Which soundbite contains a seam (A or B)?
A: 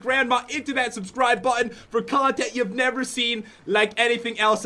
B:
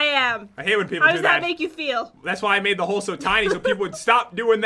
A